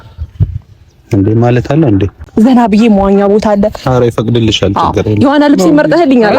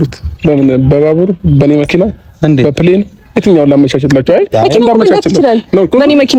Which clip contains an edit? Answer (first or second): first